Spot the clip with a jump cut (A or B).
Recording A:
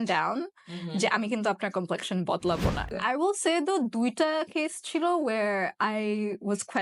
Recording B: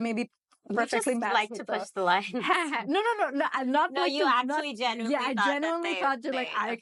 A